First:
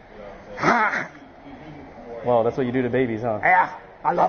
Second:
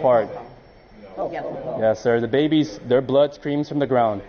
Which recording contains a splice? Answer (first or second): first